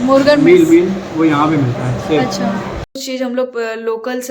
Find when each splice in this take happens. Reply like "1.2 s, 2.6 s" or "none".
3.0 s

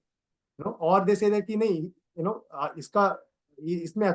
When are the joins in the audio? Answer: none

